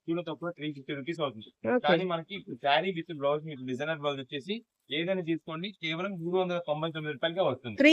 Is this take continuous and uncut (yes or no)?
yes